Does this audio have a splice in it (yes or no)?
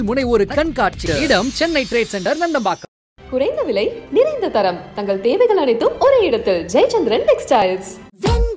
no